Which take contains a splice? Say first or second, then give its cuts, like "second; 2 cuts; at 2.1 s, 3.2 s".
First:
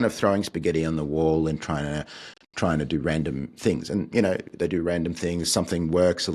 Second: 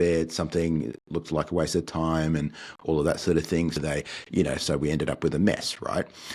second; 1 cut; at 3.8 s